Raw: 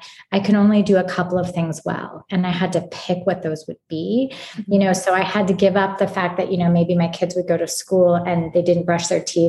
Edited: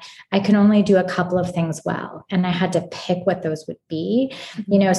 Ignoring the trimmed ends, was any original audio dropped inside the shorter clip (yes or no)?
no